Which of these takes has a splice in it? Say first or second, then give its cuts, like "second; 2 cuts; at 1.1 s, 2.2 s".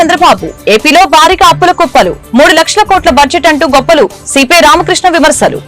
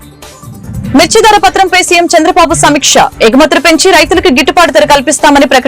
second; 1 cut; at 0.9 s